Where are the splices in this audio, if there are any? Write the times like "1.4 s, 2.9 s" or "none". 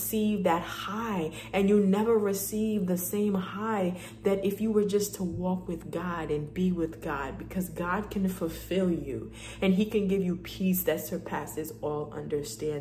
none